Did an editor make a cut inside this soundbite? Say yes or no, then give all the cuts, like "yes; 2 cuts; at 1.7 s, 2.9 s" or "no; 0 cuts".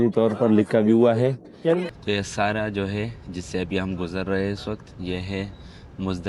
yes; 1 cut; at 1.8 s